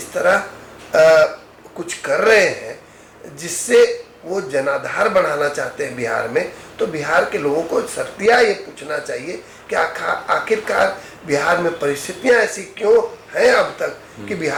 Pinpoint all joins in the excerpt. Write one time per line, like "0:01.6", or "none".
none